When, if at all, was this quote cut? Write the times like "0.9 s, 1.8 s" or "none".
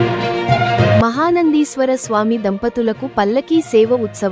0.9 s